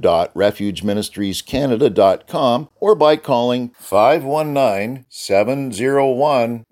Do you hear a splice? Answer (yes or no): yes